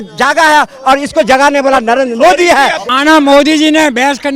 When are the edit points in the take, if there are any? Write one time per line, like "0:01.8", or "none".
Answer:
0:02.8